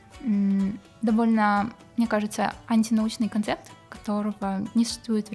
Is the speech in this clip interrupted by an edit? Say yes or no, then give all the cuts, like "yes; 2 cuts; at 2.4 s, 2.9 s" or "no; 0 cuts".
no; 0 cuts